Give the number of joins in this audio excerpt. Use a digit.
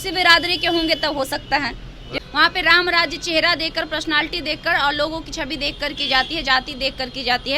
1